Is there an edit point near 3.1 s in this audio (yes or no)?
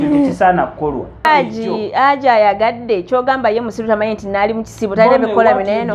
no